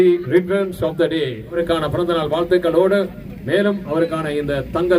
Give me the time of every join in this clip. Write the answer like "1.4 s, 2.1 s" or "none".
1.6 s